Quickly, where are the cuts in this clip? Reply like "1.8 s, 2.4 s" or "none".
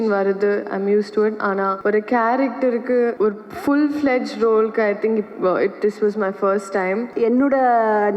1.8 s, 3.1 s, 7.1 s